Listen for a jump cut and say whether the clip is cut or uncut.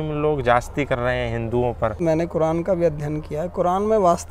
cut